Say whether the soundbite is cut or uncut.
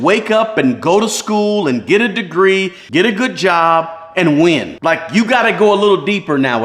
uncut